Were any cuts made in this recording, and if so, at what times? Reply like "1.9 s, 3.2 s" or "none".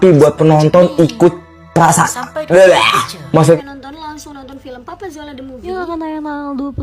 3.6 s